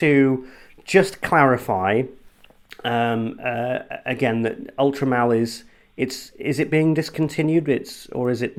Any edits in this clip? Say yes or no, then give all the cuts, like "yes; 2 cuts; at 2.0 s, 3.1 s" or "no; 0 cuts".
no; 0 cuts